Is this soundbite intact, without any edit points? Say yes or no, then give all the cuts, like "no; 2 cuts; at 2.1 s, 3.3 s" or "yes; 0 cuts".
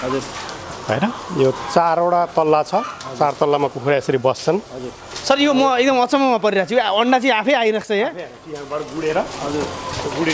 yes; 0 cuts